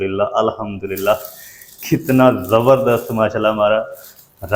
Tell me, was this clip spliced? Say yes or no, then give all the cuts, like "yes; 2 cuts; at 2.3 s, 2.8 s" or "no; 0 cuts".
no; 0 cuts